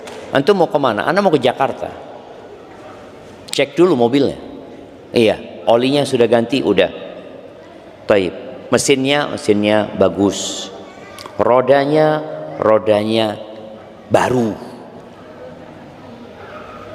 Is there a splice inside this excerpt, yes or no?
no